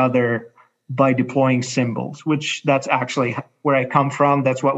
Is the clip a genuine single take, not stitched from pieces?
yes; 0 cuts

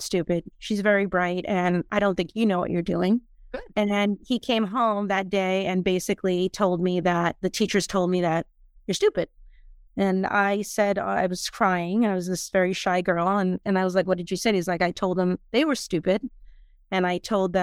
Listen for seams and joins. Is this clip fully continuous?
yes; 0 cuts

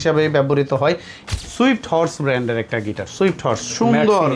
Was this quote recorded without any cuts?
no; 1 cut; at 1.1 s

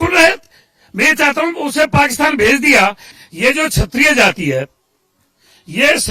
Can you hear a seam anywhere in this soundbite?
yes; 1 cut; at 3.1 s

